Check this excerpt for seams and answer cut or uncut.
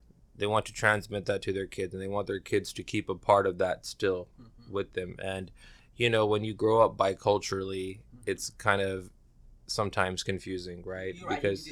uncut